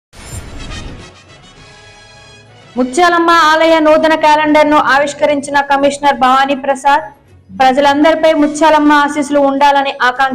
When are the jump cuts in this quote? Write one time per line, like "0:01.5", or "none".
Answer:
none

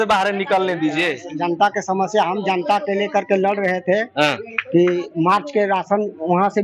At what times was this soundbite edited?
none

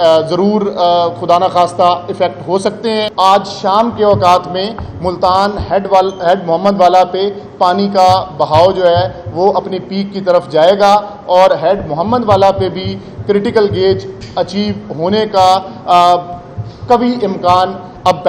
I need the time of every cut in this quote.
0:03.1

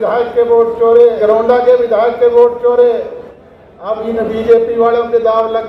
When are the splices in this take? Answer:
0:01.2
0:03.4

